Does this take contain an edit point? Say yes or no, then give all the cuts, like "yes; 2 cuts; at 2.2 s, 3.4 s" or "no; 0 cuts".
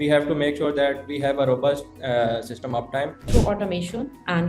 yes; 1 cut; at 3.3 s